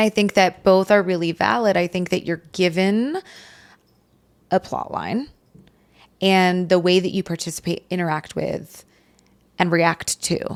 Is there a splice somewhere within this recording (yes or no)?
no